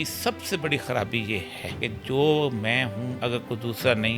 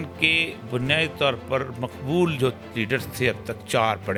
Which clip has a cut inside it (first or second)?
first